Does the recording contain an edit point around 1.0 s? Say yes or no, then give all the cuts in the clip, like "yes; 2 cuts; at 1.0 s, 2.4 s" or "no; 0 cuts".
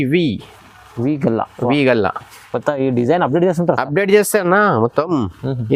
no; 0 cuts